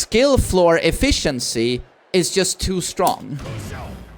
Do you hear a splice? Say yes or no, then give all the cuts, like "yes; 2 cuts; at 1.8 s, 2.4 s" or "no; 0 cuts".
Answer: no; 0 cuts